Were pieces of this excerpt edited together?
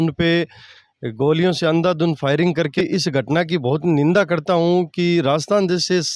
yes; 1 cut; at 2.8 s

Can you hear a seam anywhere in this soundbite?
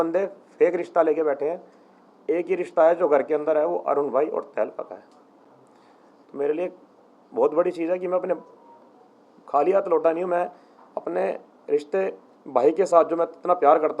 no; 0 cuts

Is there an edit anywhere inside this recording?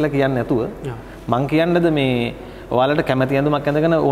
no; 0 cuts

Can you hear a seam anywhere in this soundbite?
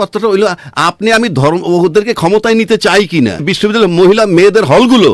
yes; 1 cut; at 3.5 s

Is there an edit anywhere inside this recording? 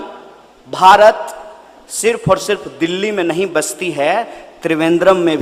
no; 0 cuts

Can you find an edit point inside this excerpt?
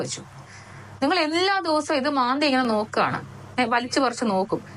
no; 0 cuts

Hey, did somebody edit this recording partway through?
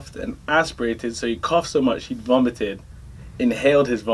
no; 0 cuts

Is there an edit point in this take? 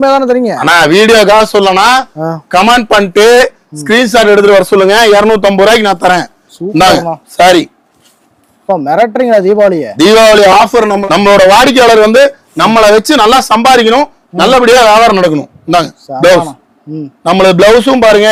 no; 0 cuts

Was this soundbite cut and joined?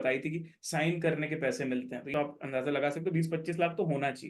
yes; 1 cut; at 2.1 s

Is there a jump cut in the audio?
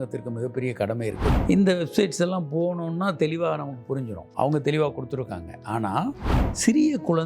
yes; 2 cuts; at 1.4 s, 6.1 s

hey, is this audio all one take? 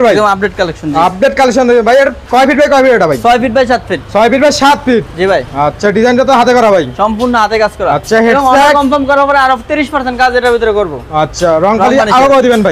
yes; 0 cuts

